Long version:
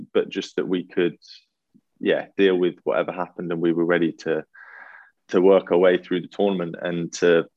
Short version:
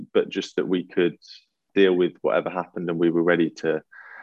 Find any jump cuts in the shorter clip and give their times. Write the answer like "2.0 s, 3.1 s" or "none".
1.7 s